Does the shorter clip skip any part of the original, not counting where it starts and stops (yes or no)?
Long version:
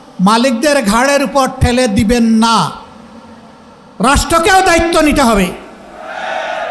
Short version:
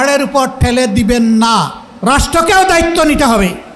yes